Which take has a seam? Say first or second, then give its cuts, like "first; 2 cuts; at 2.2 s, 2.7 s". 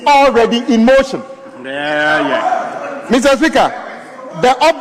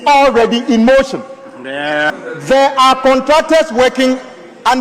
second; 1 cut; at 2.0 s